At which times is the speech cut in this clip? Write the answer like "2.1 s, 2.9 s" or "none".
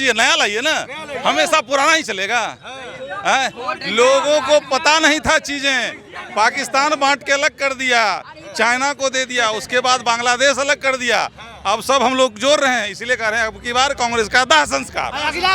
none